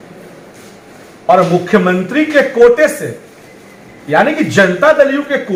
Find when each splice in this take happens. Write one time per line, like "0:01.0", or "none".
none